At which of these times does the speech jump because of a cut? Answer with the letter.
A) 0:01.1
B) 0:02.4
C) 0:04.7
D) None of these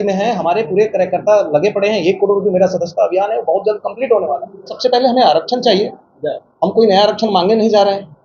C